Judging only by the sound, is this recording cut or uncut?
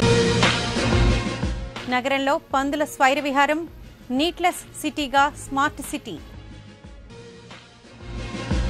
cut